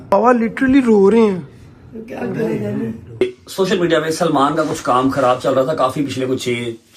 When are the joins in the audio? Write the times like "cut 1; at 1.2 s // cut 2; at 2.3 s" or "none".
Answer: cut 1; at 3.2 s